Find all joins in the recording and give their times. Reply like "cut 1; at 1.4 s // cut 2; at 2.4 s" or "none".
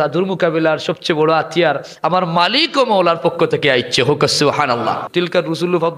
cut 1; at 5.0 s